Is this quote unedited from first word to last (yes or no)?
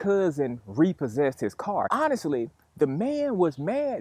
yes